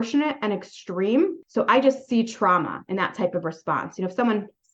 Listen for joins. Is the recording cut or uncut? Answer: cut